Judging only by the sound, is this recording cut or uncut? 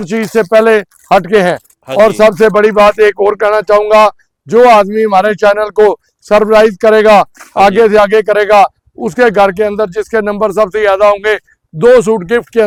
uncut